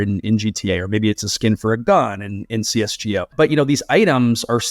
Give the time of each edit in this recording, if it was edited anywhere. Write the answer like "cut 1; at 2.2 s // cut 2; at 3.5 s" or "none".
cut 1; at 3.3 s